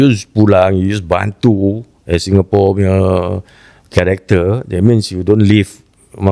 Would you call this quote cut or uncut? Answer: uncut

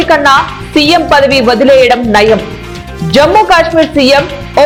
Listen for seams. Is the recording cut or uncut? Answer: uncut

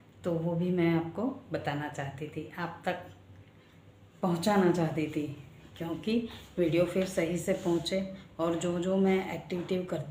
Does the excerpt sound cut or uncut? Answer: uncut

